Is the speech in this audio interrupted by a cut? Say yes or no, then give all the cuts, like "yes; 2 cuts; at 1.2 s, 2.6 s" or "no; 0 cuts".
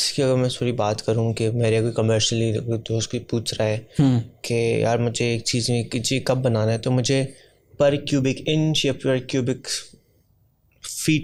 no; 0 cuts